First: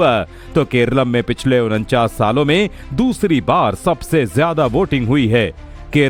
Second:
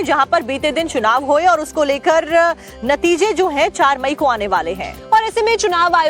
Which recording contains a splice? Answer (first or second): second